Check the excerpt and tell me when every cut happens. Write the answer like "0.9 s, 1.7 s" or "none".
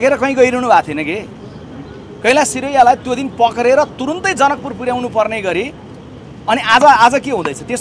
none